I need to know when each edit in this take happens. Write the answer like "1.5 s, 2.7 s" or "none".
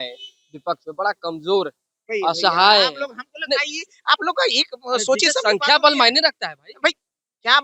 none